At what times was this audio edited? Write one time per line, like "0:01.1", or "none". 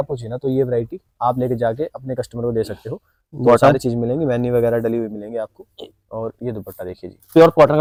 none